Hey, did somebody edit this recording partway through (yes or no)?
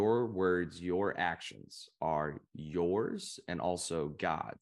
no